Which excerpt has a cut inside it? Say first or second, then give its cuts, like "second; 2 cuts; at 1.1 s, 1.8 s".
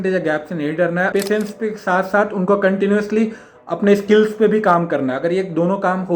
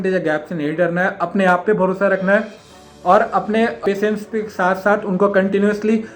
first; 1 cut; at 1.1 s